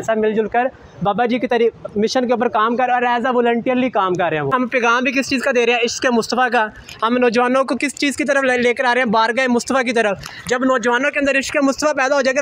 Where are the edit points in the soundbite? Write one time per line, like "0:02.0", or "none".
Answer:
0:04.5